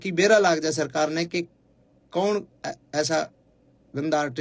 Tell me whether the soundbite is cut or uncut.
uncut